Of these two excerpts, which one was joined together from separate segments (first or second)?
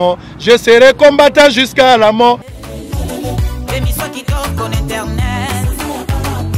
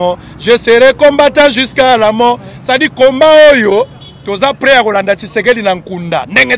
first